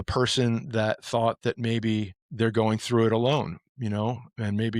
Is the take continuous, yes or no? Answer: no